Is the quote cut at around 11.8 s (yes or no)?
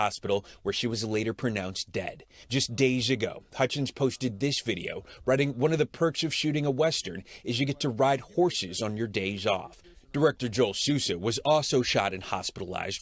yes